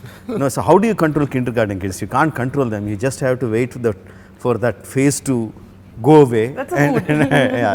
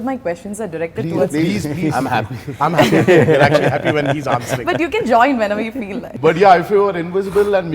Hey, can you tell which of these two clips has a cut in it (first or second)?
second